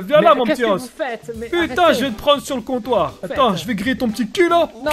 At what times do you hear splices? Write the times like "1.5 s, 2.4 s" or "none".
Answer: 3.2 s